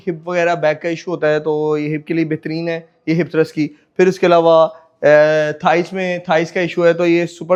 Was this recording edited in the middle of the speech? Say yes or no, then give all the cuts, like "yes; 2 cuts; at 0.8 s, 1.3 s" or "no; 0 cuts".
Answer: no; 0 cuts